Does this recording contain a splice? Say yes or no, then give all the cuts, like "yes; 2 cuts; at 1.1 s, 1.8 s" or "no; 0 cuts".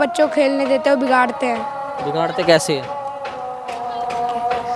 no; 0 cuts